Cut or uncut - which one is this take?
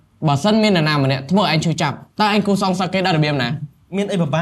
uncut